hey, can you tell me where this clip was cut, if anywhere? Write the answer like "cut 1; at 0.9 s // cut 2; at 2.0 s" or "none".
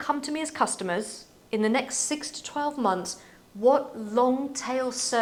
none